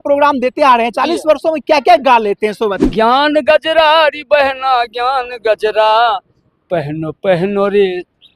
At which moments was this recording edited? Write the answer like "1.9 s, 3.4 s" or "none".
2.8 s